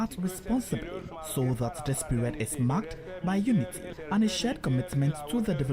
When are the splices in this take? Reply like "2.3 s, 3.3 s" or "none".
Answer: 1.2 s, 3.9 s